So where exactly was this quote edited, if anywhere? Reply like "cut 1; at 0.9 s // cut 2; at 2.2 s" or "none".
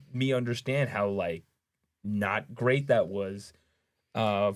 none